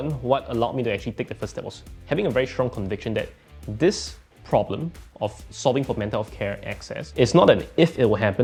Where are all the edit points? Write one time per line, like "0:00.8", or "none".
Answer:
none